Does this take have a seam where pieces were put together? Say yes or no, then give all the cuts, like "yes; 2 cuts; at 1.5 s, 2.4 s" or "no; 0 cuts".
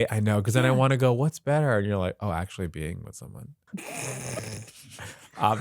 yes; 1 cut; at 3.5 s